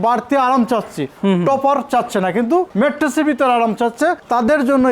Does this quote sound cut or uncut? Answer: uncut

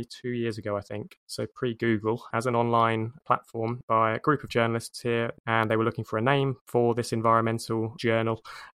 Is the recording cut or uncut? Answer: cut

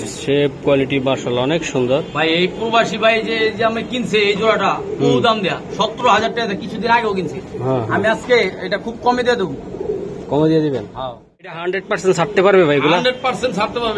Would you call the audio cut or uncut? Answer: cut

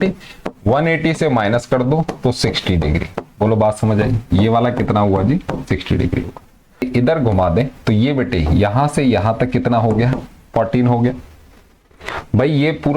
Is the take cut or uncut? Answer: cut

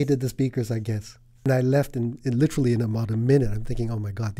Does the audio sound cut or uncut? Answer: cut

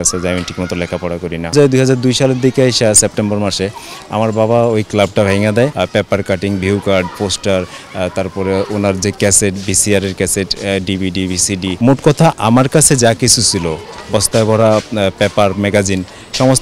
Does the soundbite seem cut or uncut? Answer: cut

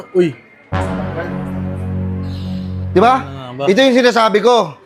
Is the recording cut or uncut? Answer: uncut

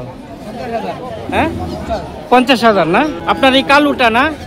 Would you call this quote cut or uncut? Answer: cut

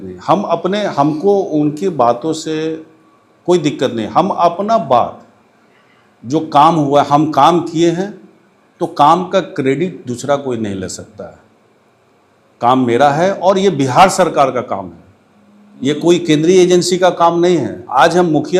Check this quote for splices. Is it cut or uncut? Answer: uncut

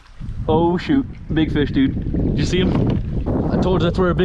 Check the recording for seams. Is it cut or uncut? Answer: cut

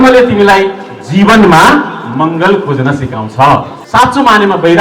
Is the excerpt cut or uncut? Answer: cut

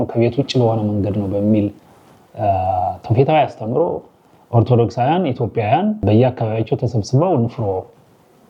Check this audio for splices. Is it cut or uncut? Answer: uncut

